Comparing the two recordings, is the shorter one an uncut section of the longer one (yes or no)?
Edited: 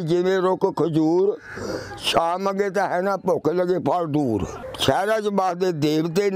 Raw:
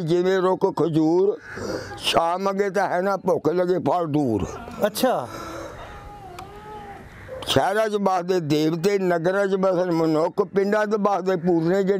no